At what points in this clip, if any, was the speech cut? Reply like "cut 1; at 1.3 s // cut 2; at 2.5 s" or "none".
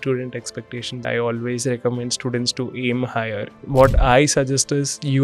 cut 1; at 1.0 s // cut 2; at 3.6 s